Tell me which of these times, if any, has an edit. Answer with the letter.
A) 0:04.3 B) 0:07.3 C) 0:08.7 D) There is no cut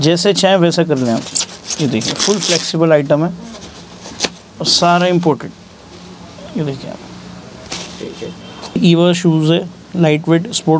C